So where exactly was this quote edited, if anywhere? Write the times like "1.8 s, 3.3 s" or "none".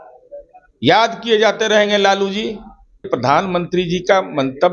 3.1 s